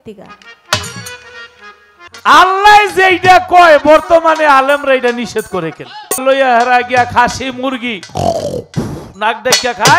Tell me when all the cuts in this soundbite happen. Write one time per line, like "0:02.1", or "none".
0:02.0
0:06.2